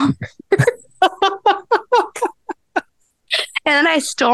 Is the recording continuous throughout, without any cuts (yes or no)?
yes